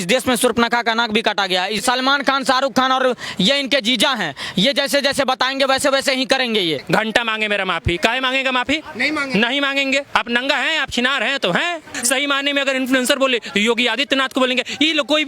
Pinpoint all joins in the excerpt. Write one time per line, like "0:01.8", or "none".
0:01.8
0:06.8
0:11.9